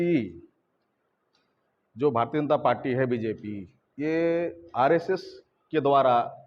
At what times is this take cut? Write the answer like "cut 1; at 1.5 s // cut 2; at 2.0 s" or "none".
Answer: none